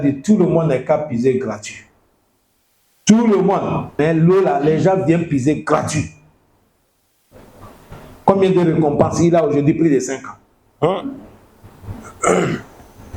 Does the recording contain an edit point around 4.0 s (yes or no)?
yes